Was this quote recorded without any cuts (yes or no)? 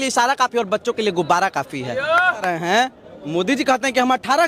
no